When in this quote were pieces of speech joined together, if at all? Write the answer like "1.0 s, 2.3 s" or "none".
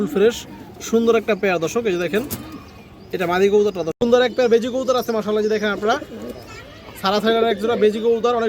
3.9 s